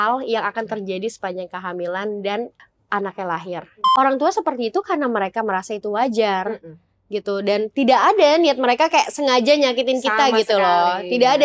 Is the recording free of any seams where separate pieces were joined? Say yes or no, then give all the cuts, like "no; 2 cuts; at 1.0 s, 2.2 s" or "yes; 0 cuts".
no; 2 cuts; at 2.6 s, 3.8 s